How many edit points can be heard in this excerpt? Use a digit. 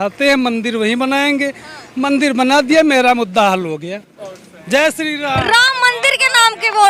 0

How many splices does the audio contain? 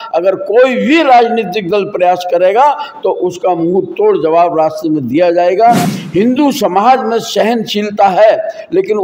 1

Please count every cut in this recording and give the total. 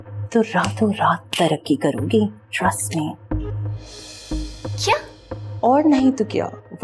0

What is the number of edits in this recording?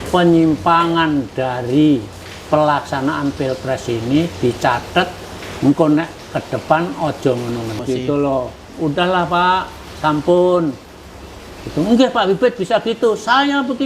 1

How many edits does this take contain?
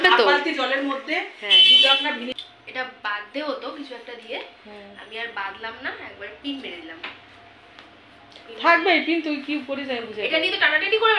1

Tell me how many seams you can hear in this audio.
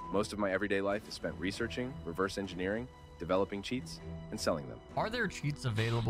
1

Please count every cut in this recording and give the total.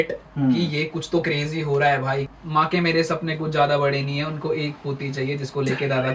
1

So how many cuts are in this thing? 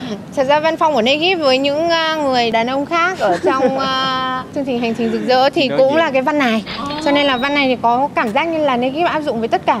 0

